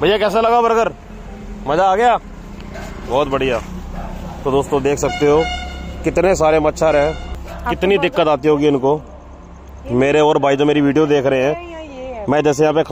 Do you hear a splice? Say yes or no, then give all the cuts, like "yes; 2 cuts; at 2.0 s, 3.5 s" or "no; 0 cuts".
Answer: yes; 1 cut; at 7.6 s